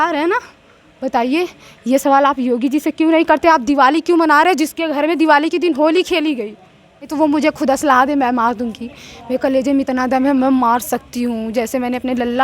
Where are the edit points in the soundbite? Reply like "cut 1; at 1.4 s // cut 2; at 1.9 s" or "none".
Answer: cut 1; at 7.1 s

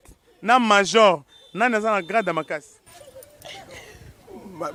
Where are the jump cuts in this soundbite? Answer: none

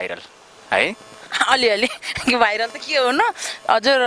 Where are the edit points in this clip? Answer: none

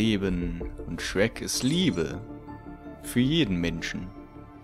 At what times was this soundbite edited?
none

